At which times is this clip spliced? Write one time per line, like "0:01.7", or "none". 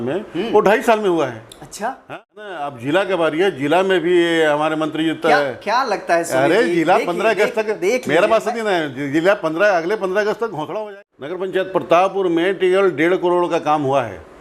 0:02.0
0:10.8